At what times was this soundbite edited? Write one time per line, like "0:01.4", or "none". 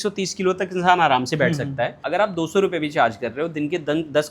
0:02.0